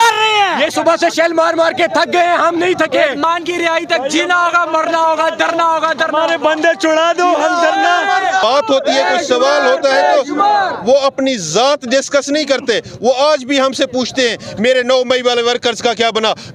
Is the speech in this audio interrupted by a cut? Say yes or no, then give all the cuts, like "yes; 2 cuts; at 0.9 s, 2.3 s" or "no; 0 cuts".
yes; 2 cuts; at 3.2 s, 8.4 s